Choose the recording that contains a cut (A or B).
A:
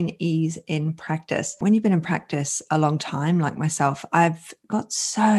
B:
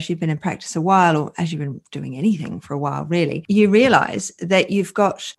A